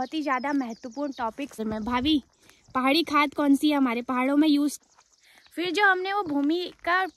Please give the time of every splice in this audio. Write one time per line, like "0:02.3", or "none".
0:01.6
0:04.8

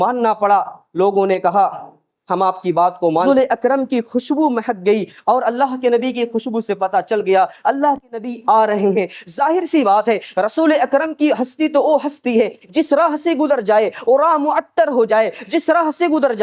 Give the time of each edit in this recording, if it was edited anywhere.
0:03.2

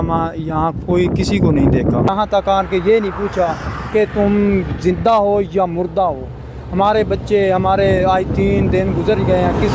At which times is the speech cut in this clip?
0:02.1

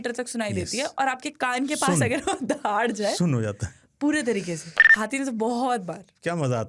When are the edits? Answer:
0:04.8

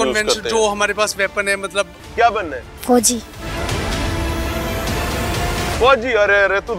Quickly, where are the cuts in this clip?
0:02.0

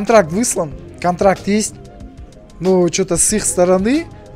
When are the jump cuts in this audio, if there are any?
none

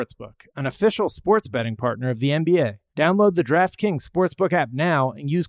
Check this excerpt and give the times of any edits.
0:02.8

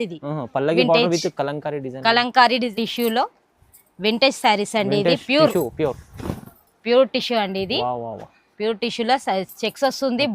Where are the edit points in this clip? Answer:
0:02.6

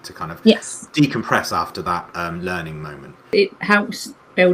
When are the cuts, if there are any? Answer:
0:03.2

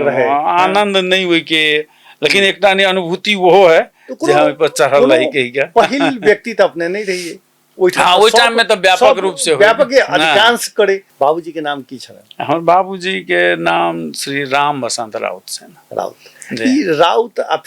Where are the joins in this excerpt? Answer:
0:11.1

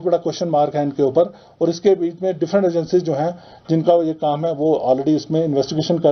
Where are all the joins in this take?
none

